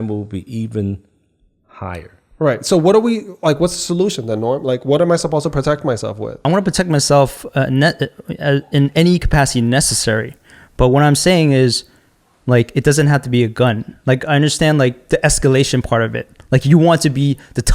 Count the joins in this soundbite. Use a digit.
1